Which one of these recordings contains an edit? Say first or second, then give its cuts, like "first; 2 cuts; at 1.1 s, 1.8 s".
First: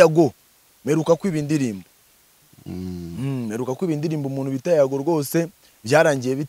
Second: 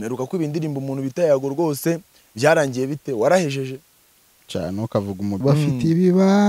second; 1 cut; at 5.4 s